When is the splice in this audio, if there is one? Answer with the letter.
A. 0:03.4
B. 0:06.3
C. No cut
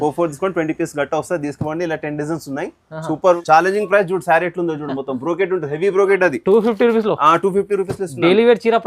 A